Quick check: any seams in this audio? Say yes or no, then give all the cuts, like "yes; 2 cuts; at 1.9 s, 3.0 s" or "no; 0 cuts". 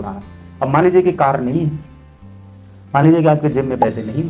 no; 0 cuts